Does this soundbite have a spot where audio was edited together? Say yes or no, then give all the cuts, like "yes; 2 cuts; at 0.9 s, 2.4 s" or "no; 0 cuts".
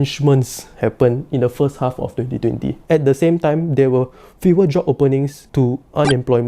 yes; 1 cut; at 2.7 s